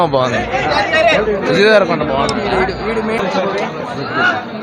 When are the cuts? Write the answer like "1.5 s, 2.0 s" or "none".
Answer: 3.2 s